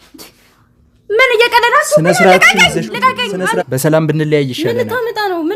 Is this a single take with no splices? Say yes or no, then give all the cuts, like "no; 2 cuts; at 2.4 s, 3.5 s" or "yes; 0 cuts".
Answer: no; 1 cut; at 3.6 s